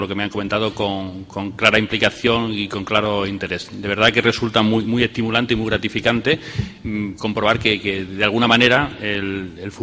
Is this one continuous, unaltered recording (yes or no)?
no